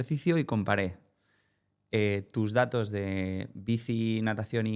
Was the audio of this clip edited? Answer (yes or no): no